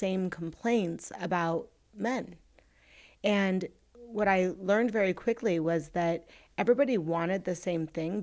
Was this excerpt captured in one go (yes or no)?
yes